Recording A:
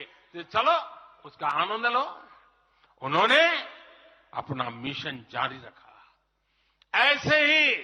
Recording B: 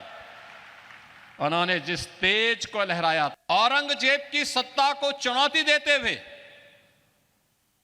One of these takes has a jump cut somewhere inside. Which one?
B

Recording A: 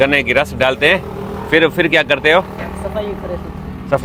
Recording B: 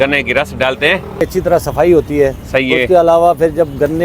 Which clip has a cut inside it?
B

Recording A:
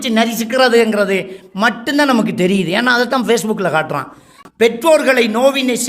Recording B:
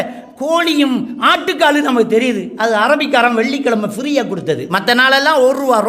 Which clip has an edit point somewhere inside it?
A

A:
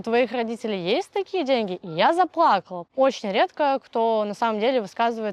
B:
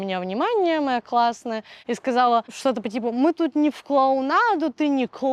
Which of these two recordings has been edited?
A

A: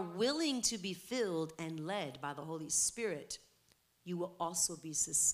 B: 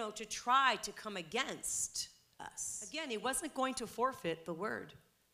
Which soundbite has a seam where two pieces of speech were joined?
B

